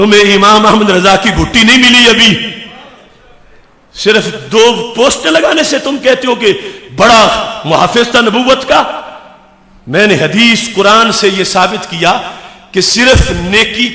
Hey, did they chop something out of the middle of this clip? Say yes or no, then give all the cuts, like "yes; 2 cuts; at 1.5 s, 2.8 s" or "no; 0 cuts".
no; 0 cuts